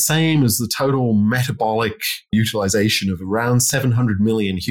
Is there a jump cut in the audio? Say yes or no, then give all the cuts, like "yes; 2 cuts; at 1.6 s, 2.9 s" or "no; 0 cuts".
yes; 1 cut; at 2.3 s